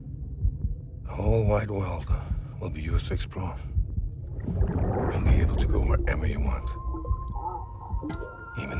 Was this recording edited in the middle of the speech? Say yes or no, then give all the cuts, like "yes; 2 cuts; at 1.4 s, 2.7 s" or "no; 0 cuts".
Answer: no; 0 cuts